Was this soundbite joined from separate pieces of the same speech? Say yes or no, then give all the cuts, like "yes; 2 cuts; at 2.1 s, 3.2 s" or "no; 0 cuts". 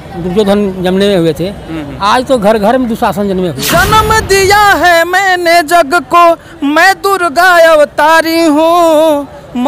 yes; 1 cut; at 3.6 s